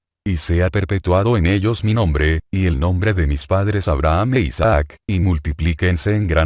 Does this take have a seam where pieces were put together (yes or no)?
no